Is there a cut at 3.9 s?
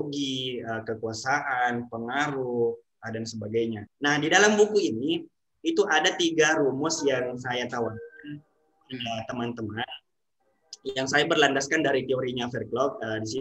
yes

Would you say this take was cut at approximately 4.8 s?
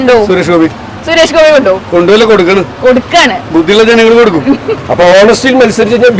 yes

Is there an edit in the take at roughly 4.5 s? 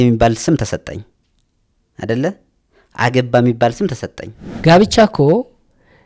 yes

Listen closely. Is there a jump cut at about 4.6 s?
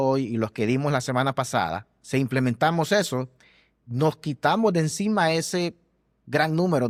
no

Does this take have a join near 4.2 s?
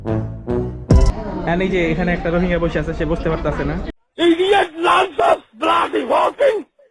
no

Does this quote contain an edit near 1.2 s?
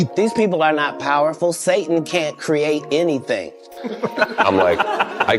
no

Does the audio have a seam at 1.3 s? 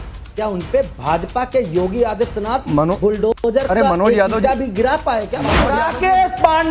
no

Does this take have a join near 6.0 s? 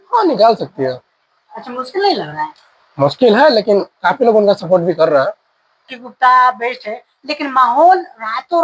yes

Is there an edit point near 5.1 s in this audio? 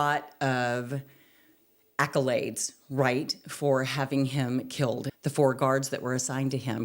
yes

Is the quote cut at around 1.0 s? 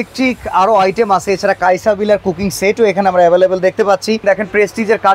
no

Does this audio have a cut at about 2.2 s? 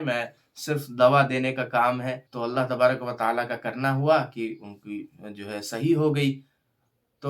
yes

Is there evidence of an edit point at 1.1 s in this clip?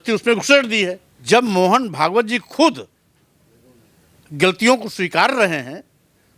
yes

